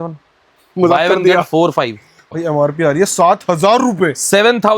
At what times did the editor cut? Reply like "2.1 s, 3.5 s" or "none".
2.3 s